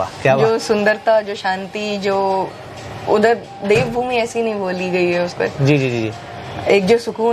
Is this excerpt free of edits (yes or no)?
yes